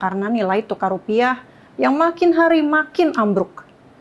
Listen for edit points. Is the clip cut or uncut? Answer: uncut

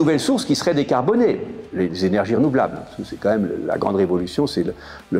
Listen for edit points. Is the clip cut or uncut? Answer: uncut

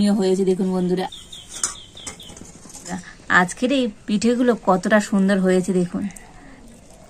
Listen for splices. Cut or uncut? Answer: cut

